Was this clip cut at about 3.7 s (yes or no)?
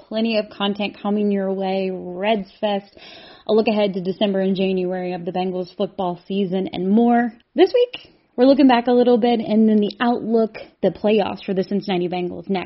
no